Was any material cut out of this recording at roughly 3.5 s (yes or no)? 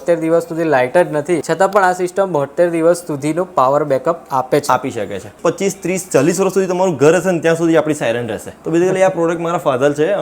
no